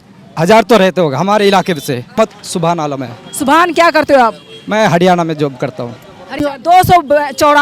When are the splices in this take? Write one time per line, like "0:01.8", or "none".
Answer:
0:02.2
0:06.4